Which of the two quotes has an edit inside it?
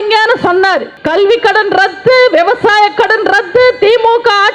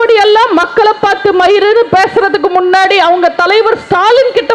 first; 1 cut; at 0.9 s

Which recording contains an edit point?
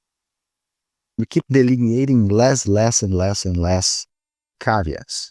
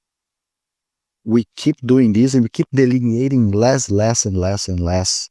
first; 1 cut; at 1.2 s

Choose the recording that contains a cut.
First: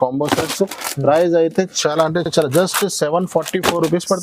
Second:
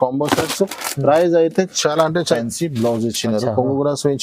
second; 1 cut; at 2.2 s

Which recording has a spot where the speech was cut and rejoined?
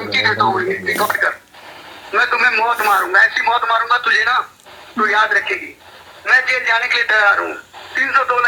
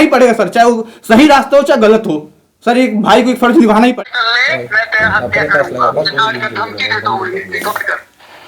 second; 1 cut; at 4.0 s

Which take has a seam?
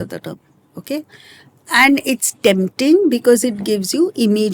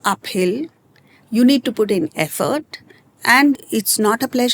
second; 1 cut; at 3.5 s

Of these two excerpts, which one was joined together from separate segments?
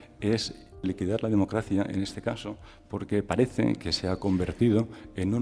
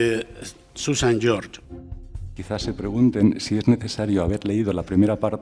second; 1 cut; at 1.3 s

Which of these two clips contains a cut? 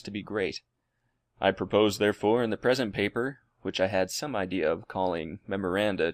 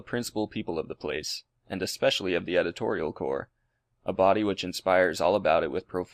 first; 1 cut; at 3.5 s

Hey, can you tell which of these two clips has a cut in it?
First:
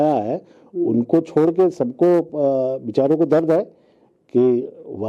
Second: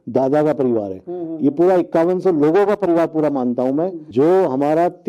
second; 1 cut; at 4.0 s

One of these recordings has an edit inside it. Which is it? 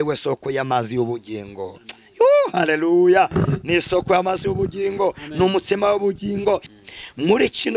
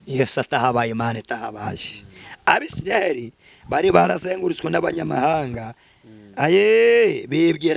first; 1 cut; at 6.7 s

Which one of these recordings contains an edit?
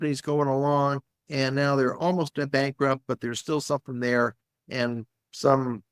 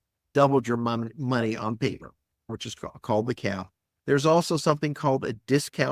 second; 1 cut; at 2.5 s

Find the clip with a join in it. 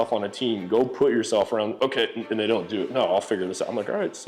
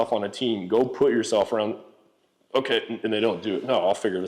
first; 1 cut; at 1.7 s

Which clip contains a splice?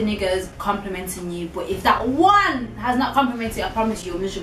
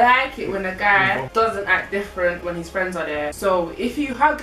second; 2 cuts; at 1.3 s, 3.3 s

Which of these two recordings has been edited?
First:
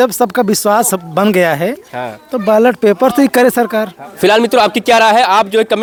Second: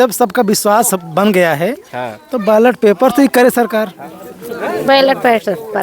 second; 1 cut; at 4.0 s

